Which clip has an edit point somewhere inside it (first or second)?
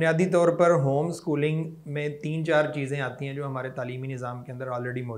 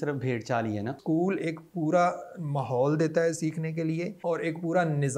second